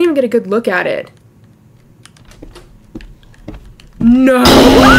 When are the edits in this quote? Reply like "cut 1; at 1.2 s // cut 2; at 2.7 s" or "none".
none